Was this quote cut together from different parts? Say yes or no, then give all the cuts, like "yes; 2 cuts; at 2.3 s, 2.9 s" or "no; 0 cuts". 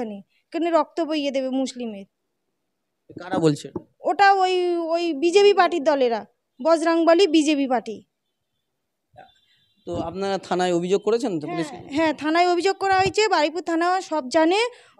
no; 0 cuts